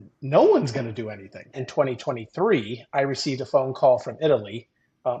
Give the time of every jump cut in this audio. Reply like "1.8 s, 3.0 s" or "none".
1.6 s